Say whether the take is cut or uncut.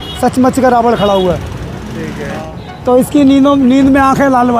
cut